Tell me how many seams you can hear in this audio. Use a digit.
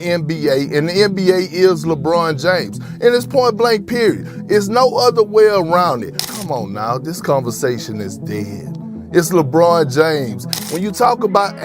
2